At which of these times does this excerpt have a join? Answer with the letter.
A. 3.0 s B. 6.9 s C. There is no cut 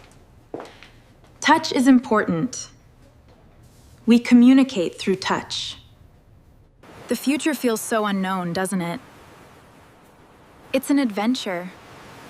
B